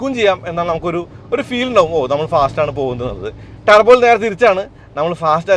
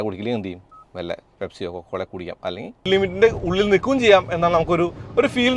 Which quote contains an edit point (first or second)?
second